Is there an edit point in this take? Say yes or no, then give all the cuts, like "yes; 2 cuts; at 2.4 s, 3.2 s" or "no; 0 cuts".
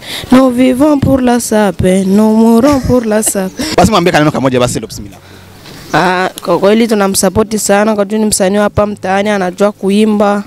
yes; 1 cut; at 3.6 s